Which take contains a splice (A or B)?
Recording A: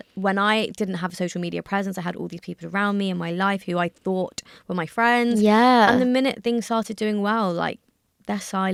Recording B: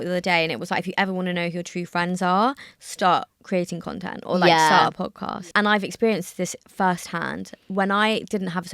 B